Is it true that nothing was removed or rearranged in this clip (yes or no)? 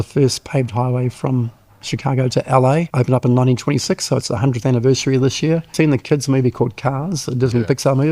no